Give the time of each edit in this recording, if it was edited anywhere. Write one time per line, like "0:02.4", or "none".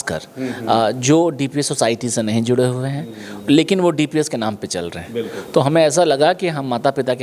none